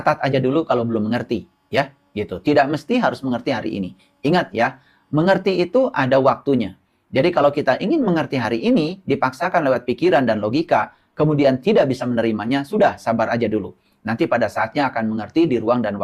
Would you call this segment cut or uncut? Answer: uncut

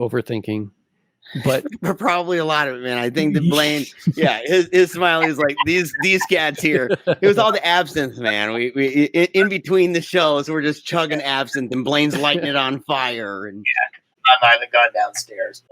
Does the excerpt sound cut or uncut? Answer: cut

